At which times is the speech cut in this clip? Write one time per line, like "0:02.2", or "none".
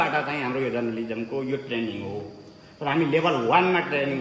none